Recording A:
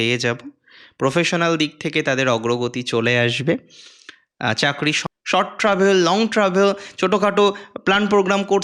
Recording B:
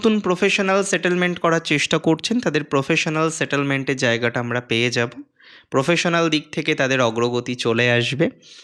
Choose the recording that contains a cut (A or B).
A